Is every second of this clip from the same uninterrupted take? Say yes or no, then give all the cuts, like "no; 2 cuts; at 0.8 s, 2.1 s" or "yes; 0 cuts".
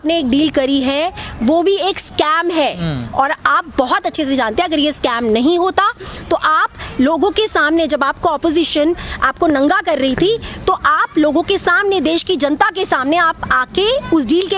yes; 0 cuts